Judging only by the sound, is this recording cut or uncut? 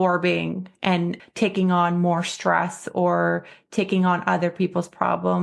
cut